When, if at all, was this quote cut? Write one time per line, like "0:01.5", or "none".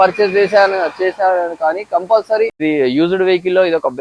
0:02.6